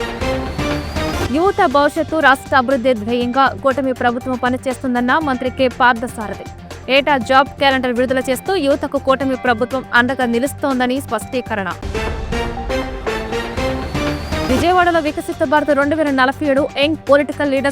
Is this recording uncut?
no; 1 cut; at 1.1 s

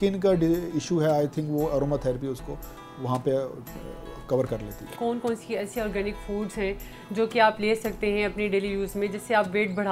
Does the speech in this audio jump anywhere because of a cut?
yes; 1 cut; at 4.9 s

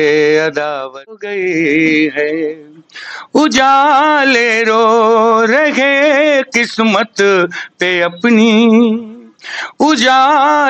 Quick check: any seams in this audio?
yes; 1 cut; at 1.3 s

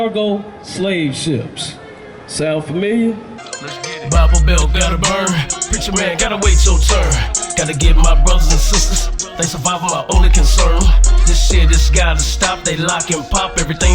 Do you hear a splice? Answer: yes; 1 cut; at 3.5 s

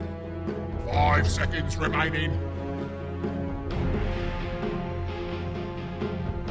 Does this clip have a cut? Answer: yes; 1 cut; at 2.5 s

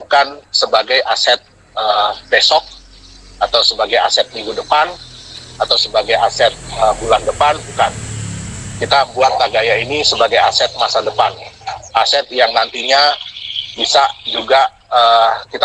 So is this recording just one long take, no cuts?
yes; 0 cuts

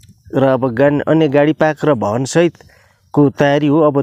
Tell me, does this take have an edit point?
no; 0 cuts

